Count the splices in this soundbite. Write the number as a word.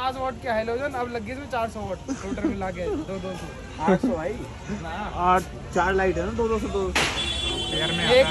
zero